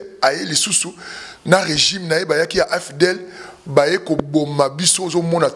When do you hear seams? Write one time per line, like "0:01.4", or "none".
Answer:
none

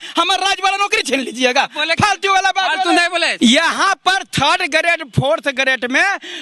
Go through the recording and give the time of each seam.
0:03.3

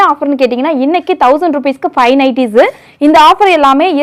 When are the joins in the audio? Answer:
none

